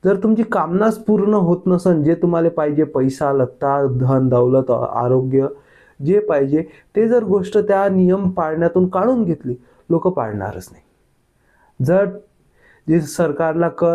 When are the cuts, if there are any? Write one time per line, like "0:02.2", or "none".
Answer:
none